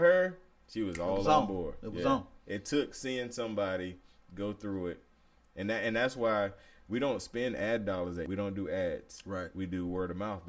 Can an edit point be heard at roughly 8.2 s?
yes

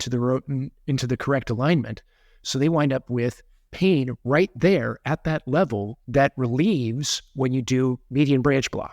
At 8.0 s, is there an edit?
yes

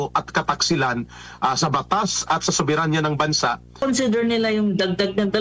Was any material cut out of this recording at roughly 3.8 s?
yes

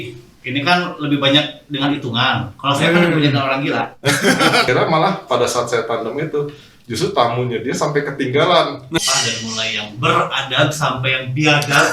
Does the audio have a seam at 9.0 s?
yes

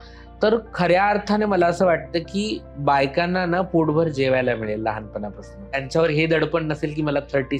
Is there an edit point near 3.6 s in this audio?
no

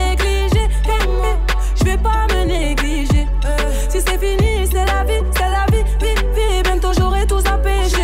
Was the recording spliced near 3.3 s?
no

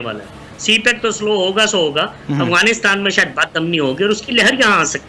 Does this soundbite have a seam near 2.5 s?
no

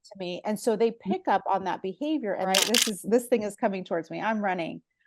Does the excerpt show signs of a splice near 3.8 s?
no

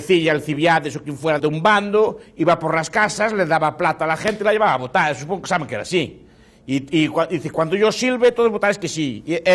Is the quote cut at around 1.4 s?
yes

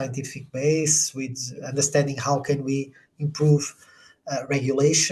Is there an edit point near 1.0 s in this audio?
no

